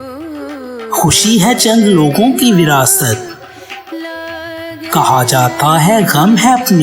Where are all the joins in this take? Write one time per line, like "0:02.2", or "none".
0:00.9